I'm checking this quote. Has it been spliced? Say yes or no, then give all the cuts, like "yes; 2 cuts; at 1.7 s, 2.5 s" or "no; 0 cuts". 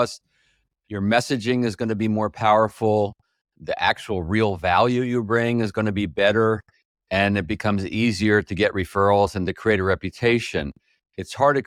no; 0 cuts